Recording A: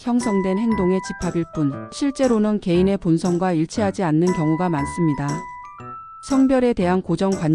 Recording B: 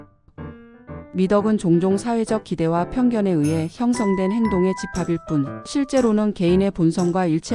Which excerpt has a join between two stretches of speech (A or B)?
B